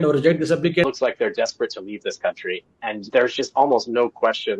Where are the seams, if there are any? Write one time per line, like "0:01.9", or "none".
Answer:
0:00.8
0:03.0